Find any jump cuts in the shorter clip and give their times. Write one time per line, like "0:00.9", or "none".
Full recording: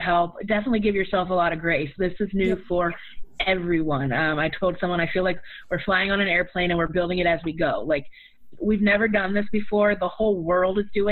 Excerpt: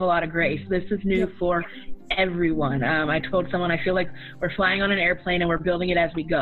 none